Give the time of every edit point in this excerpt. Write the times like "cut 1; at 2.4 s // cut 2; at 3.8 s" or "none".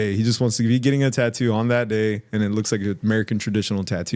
none